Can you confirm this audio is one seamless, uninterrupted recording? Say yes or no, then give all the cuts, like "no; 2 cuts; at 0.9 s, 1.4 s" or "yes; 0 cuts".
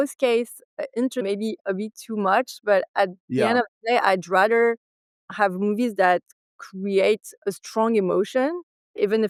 yes; 0 cuts